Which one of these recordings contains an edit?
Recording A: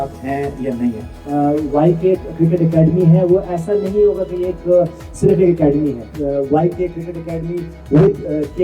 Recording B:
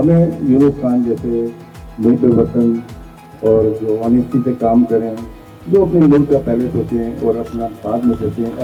A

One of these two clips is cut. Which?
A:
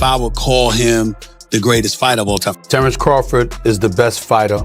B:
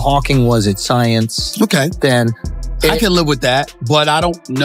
A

